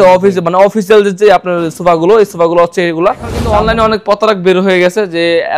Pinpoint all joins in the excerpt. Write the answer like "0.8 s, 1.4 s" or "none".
3.4 s